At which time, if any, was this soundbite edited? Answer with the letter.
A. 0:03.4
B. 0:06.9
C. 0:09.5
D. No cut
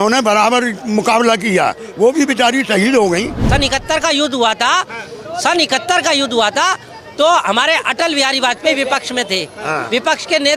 A